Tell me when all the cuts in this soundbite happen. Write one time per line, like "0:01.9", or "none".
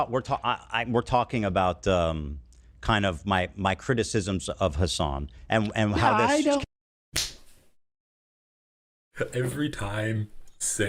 none